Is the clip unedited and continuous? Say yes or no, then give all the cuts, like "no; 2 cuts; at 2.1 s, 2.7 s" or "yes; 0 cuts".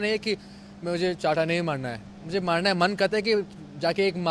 yes; 0 cuts